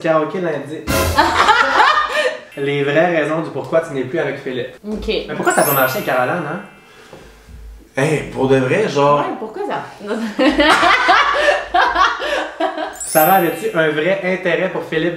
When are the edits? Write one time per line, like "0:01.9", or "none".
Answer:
0:02.5
0:05.3
0:13.0